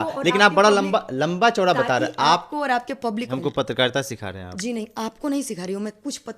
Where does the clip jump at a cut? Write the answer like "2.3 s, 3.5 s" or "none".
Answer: 3.3 s